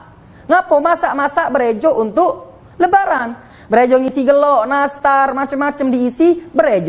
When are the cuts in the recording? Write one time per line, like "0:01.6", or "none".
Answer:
0:03.5